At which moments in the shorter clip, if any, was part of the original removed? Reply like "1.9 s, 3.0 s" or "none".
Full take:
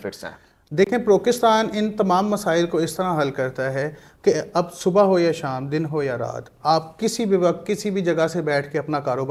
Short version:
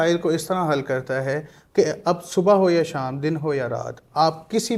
none